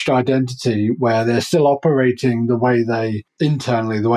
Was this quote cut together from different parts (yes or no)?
yes